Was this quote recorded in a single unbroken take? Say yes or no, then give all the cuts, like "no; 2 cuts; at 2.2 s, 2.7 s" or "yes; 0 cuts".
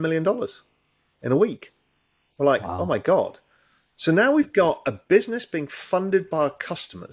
yes; 0 cuts